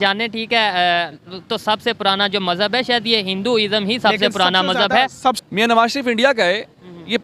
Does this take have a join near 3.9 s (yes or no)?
no